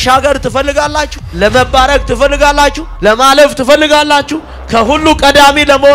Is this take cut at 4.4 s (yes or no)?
no